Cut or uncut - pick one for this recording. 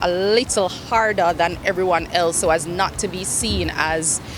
uncut